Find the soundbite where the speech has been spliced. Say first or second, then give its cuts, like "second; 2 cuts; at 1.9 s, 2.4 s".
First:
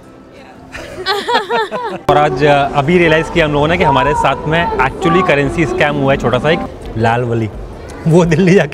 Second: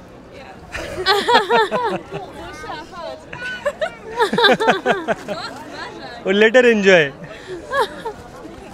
first; 2 cuts; at 2.1 s, 6.7 s